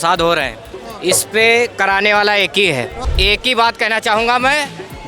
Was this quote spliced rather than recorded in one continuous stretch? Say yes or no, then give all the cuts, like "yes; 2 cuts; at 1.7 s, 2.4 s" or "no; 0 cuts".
yes; 1 cut; at 3.0 s